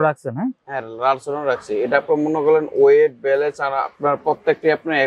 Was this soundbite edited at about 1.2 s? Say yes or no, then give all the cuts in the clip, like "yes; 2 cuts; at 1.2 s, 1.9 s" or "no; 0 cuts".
no; 0 cuts